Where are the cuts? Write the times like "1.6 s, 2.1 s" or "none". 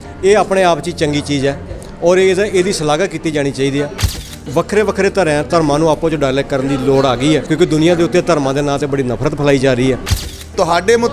4.1 s, 7.5 s, 10.3 s